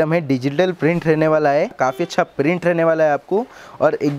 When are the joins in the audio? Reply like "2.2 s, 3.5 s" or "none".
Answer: 1.8 s